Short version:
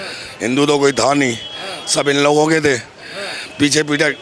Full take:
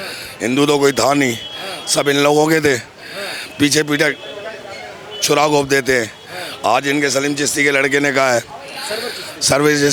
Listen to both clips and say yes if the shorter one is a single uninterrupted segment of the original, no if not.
yes